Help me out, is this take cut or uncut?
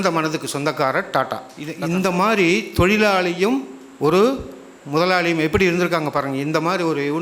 cut